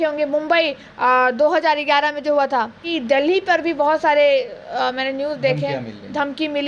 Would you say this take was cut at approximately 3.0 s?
yes; 1 cut; at 3.0 s

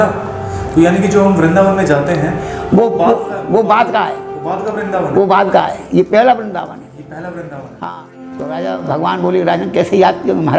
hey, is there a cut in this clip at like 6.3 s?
no; 1 cut; at 8.5 s

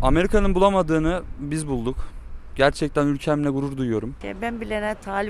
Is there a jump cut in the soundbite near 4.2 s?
yes; 1 cut; at 4.2 s

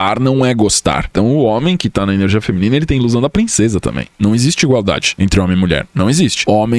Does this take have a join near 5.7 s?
no; 2 cuts; at 1.1 s, 4.0 s

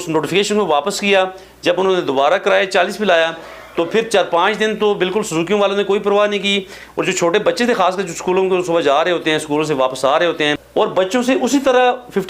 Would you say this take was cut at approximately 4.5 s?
no; 1 cut; at 10.8 s

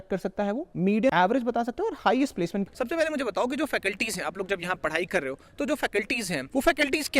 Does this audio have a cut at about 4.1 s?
no; 2 cuts; at 1.1 s, 2.7 s

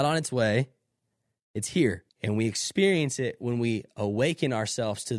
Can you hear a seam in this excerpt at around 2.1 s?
yes; 1 cut; at 2.1 s

